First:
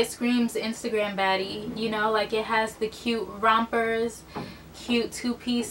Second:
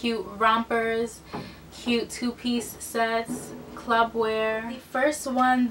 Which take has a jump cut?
second; 1 cut; at 4.8 s

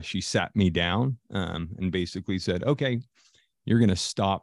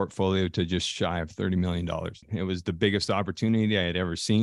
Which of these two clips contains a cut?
second; 1 cut; at 2.3 s

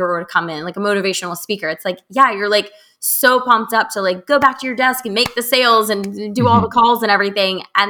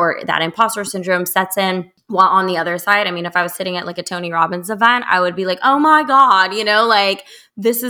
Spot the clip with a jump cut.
second; 1 cut; at 2.0 s

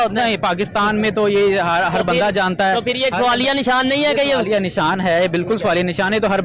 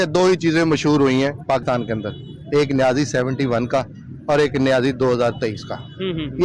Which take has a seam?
second; 1 cut; at 1.6 s

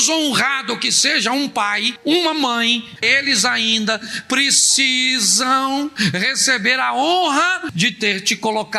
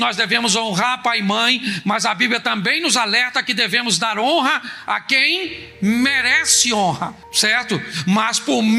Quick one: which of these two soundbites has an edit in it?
first; 2 cuts; at 3.0 s, 7.7 s

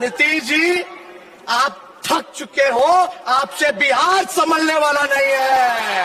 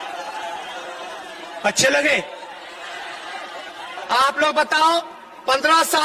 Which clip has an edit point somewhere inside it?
second; 1 cut; at 3.9 s

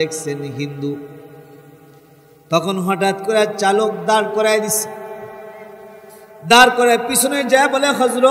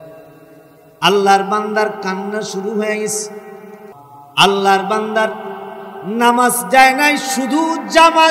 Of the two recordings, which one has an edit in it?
second; 1 cut; at 3.9 s

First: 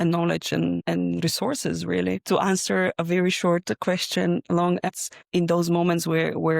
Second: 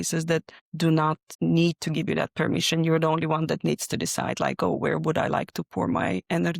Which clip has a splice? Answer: first; 2 cuts; at 2.2 s, 4.9 s

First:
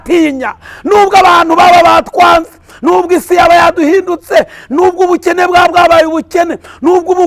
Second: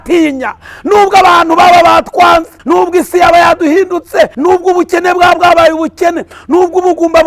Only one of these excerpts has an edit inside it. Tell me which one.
second; 2 cuts; at 2.5 s, 4.3 s

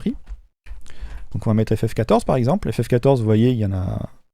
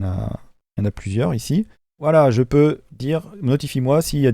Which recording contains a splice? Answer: second; 1 cut; at 1.9 s

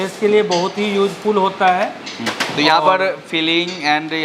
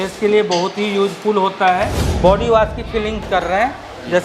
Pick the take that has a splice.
second; 1 cut; at 2.0 s

